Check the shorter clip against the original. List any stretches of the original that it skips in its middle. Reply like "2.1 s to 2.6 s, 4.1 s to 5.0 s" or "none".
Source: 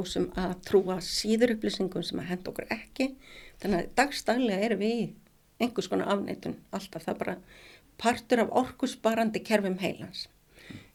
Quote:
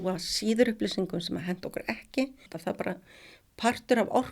3.3 s to 6.9 s